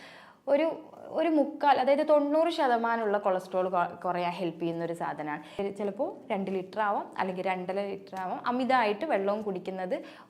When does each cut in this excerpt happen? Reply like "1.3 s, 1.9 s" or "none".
5.6 s